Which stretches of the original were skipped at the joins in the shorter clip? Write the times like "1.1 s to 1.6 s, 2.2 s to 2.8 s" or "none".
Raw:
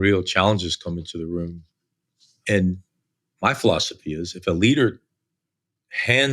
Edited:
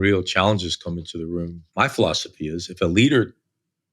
1.6 s to 3.2 s